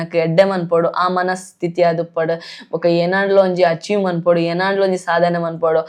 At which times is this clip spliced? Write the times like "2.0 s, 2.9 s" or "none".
none